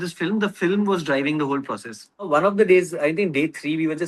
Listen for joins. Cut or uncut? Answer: cut